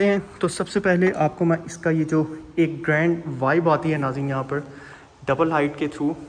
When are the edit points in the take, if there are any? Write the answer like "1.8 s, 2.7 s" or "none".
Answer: none